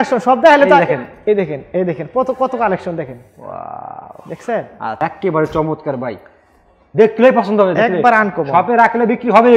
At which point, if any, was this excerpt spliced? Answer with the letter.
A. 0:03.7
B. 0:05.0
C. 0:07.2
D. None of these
B